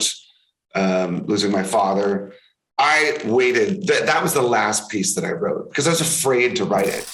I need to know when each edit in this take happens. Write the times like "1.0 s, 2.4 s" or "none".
none